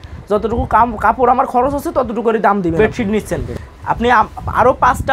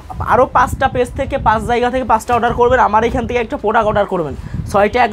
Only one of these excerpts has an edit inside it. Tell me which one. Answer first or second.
first